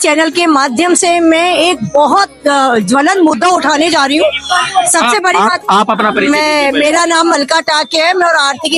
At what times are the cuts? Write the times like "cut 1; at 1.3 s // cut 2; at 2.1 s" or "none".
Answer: none